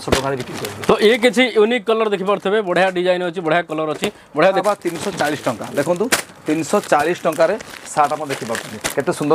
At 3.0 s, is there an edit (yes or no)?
no